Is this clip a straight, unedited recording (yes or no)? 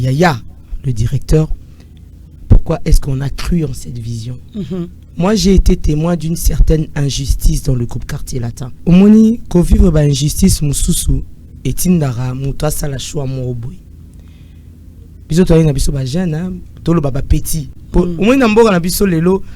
yes